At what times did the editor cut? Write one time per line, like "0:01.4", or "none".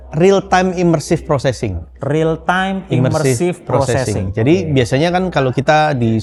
none